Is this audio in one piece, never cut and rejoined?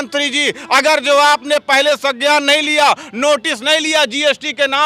yes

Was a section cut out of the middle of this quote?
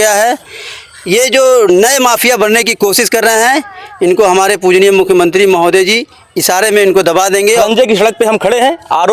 yes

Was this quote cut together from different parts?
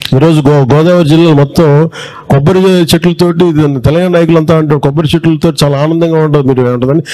no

